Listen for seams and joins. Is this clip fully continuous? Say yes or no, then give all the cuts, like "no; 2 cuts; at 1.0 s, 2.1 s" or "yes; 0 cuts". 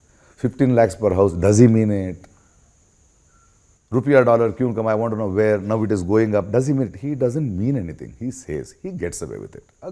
yes; 0 cuts